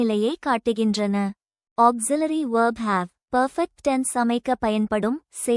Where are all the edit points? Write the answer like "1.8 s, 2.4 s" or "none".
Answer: 1.5 s, 3.2 s